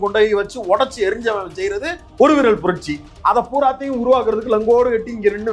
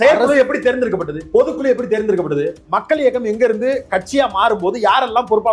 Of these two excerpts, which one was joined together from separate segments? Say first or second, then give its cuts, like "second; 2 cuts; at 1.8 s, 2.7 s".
second; 2 cuts; at 1.1 s, 2.6 s